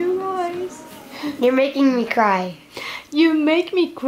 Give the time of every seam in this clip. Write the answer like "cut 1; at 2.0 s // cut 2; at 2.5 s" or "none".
none